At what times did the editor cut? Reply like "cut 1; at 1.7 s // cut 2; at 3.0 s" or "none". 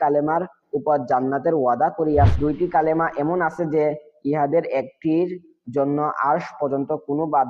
cut 1; at 2.3 s